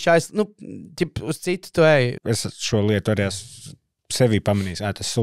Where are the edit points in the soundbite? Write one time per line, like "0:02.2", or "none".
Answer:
0:02.2